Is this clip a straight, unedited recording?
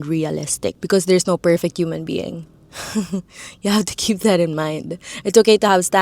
yes; 0 cuts

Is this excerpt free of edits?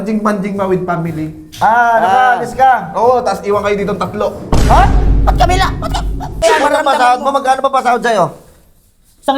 no; 1 cut; at 6.4 s

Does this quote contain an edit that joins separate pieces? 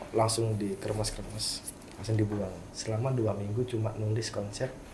yes; 1 cut; at 2.7 s

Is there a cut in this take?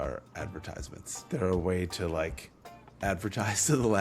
no; 0 cuts

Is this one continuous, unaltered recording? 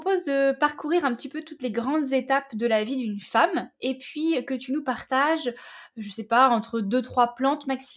yes; 0 cuts

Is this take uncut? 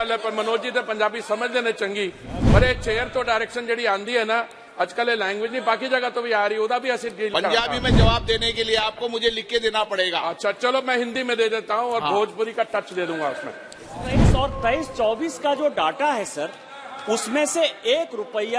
no; 1 cut; at 14.1 s

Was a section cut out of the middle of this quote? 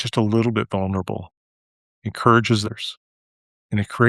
yes; 1 cut; at 2.6 s

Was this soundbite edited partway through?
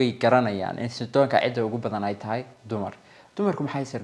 no; 0 cuts

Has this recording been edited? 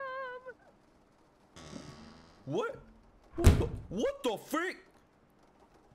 yes; 1 cut; at 1.4 s

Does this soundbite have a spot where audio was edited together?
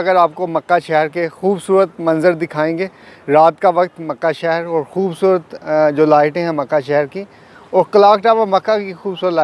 no; 0 cuts

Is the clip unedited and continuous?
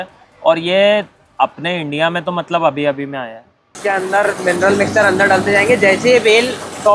no; 1 cut; at 3.8 s

